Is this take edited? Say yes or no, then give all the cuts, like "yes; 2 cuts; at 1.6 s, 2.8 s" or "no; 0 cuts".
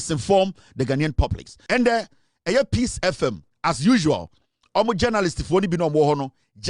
yes; 2 cuts; at 1.6 s, 3.5 s